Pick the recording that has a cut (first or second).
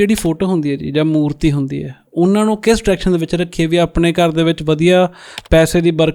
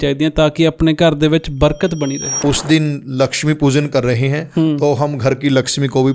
second